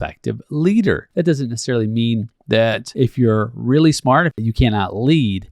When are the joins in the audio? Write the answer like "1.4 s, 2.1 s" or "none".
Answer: 1.1 s, 2.8 s, 4.4 s